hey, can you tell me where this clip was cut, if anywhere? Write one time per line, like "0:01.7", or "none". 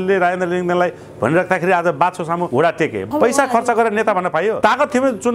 0:02.8
0:04.6